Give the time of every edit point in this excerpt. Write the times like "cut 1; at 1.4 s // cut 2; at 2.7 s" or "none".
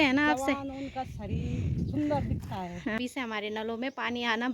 cut 1; at 2.9 s